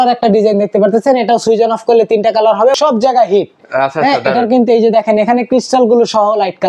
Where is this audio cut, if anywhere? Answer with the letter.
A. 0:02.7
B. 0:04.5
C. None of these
A